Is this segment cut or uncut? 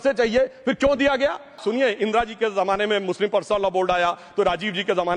cut